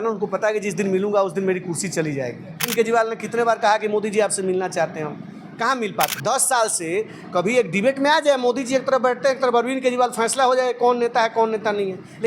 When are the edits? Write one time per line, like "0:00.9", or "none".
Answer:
0:02.7
0:06.1

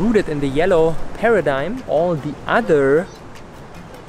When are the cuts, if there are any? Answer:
0:01.8

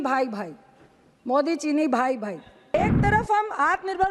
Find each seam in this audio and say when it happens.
0:02.7

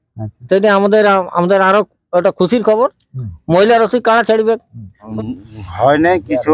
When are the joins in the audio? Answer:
0:05.0

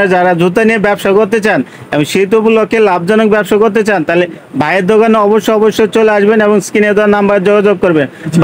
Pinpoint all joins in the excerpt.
none

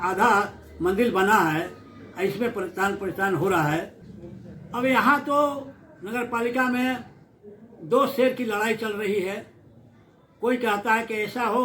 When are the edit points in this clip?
0:04.1

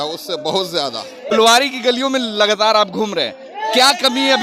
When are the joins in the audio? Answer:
0:01.3

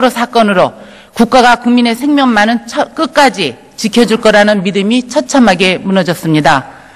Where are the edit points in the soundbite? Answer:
0:03.3

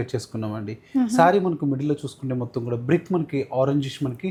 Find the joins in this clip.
none

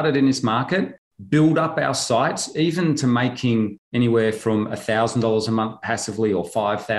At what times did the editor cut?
none

